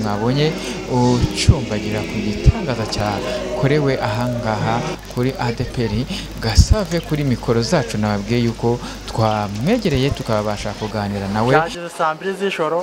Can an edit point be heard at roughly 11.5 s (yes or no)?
yes